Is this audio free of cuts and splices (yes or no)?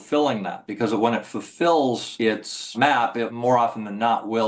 yes